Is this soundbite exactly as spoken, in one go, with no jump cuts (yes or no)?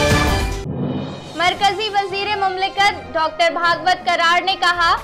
yes